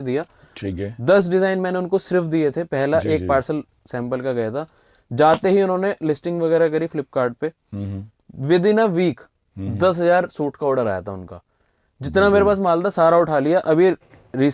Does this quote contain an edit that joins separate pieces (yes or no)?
no